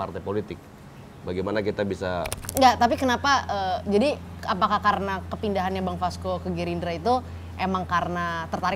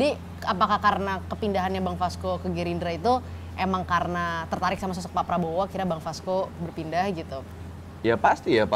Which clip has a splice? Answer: first; 1 cut; at 2.4 s

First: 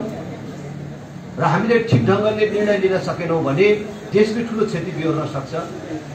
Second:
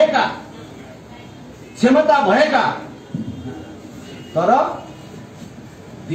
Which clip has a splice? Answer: first; 1 cut; at 4.0 s

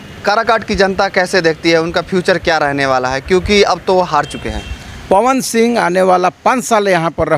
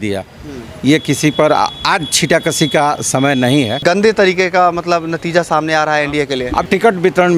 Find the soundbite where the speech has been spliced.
second; 2 cuts; at 3.8 s, 6.7 s

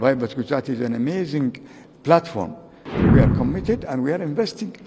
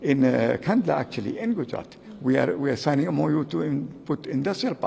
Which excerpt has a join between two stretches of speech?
first; 1 cut; at 3.0 s

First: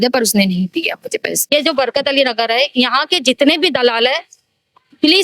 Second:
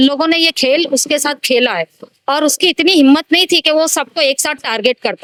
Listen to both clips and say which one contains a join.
first; 1 cut; at 1.4 s

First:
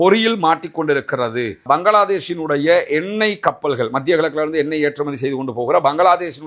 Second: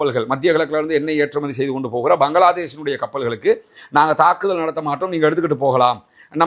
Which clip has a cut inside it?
first; 1 cut; at 1.5 s

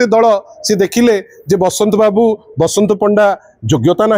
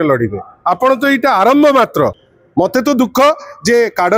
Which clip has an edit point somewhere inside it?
second; 1 cut; at 2.2 s

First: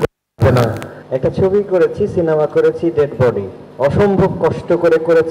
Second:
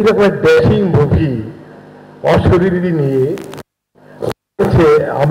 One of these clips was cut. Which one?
first; 1 cut; at 0.9 s

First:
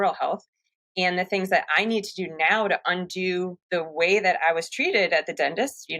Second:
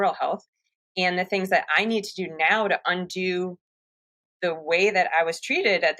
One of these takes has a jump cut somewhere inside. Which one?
first; 1 cut; at 3.6 s

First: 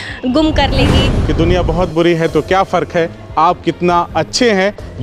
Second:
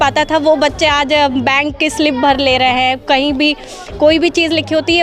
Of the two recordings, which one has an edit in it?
first; 1 cut; at 1.1 s

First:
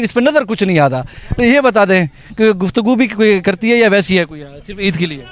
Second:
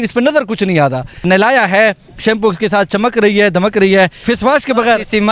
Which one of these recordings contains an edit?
second; 2 cuts; at 1.2 s, 4.2 s

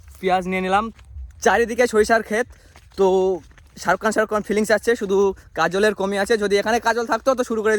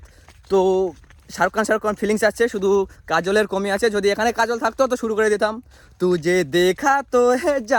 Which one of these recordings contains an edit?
first; 1 cut; at 0.9 s

